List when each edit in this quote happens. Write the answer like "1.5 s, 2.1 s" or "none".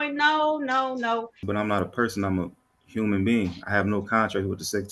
1.4 s

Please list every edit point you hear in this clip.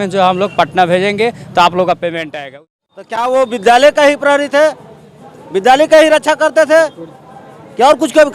2.6 s

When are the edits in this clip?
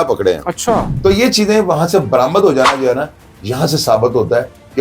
0.9 s

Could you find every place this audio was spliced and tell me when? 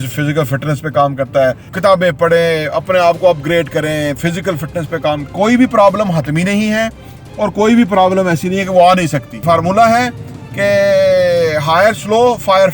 1.7 s, 5.2 s, 9.4 s

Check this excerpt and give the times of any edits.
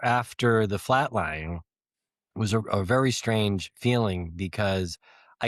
none

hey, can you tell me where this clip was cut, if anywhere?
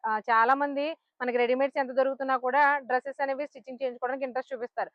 none

